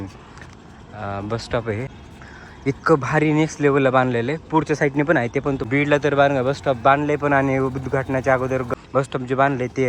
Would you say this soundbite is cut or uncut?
cut